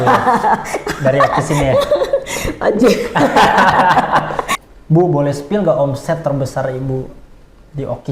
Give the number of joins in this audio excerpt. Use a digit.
1